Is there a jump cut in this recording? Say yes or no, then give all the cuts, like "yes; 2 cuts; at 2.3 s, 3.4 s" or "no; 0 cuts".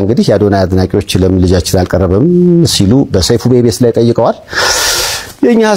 no; 0 cuts